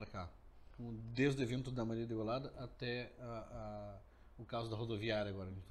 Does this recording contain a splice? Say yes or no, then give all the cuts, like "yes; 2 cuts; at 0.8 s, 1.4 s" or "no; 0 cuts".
no; 0 cuts